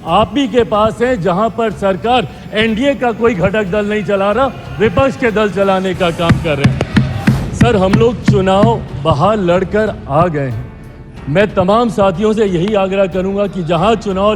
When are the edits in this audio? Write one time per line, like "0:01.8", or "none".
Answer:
0:07.1